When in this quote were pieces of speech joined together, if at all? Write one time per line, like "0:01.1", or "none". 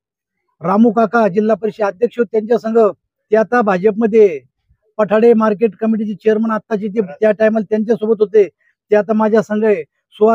none